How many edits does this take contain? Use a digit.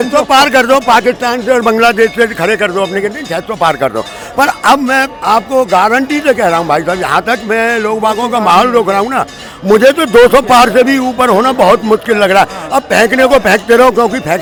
0